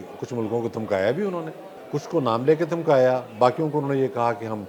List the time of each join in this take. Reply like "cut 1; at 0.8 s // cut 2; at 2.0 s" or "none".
cut 1; at 1.7 s